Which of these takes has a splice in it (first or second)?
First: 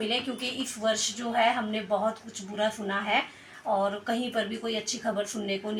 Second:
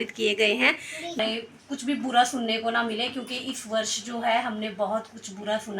second